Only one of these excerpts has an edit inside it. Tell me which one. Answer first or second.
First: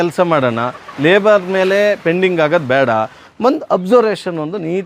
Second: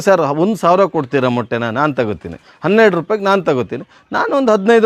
first